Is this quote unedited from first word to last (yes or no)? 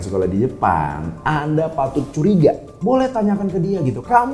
no